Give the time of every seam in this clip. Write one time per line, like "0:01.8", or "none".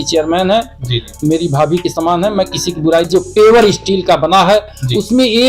0:03.1

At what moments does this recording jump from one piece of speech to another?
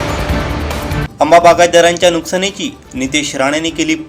0:00.9

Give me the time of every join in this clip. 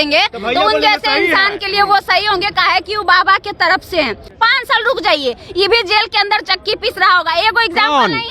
0:04.3

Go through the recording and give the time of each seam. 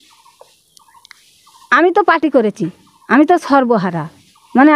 none

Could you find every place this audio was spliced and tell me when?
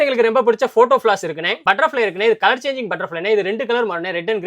0:01.5

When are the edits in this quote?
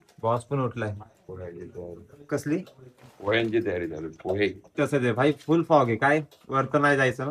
0:04.8

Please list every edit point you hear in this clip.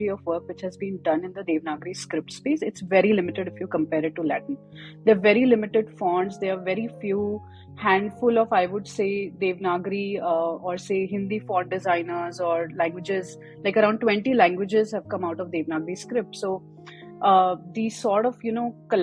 none

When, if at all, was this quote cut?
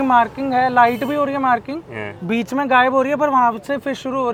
none

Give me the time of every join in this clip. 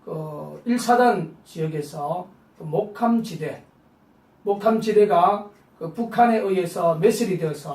0:03.3

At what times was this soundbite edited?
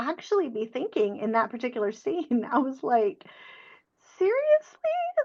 none

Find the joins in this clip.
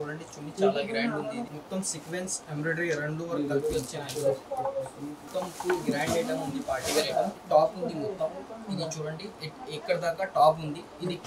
0:01.5
0:05.3
0:07.4

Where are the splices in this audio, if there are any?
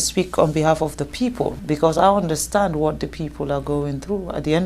0:01.6

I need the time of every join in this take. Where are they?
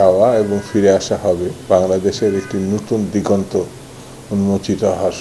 none

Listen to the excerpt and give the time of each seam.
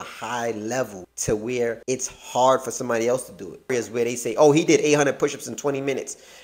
0:01.1
0:01.8
0:03.7

